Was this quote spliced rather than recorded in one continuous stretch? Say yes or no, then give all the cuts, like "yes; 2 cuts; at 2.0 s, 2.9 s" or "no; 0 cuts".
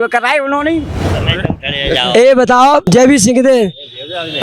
yes; 2 cuts; at 1.1 s, 2.9 s